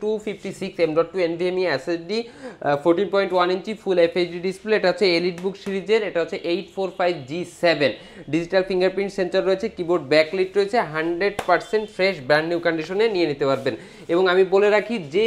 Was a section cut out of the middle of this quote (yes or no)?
no